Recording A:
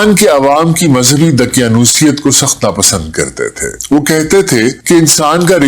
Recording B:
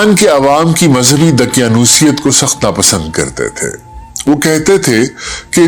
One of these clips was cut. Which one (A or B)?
A